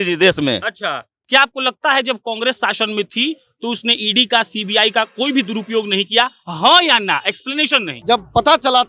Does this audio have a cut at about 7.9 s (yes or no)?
yes